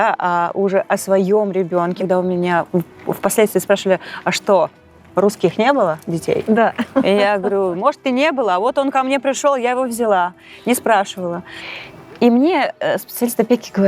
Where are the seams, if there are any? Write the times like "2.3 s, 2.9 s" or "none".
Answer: 2.0 s, 11.6 s